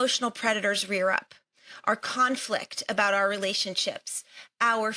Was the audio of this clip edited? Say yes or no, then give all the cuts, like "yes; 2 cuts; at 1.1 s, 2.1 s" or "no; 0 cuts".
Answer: no; 0 cuts